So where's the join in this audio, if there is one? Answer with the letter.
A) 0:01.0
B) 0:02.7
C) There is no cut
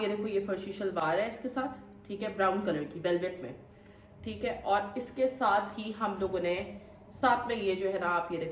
C